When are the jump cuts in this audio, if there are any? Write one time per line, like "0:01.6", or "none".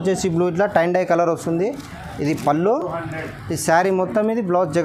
none